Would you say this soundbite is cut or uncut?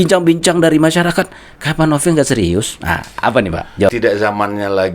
cut